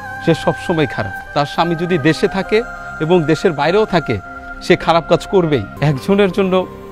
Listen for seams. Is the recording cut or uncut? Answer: cut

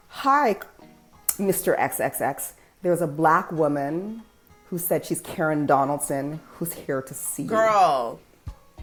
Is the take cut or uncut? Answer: uncut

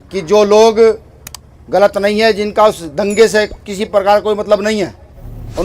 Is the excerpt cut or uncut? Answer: cut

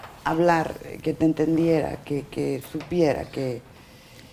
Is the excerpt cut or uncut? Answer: uncut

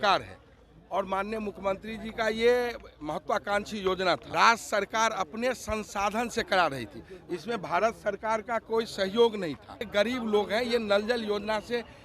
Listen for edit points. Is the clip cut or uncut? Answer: cut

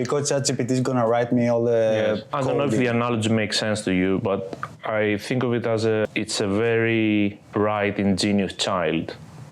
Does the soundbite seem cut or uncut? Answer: cut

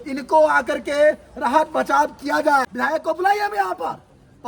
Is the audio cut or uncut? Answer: cut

